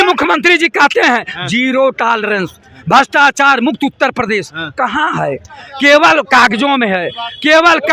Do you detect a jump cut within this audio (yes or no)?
no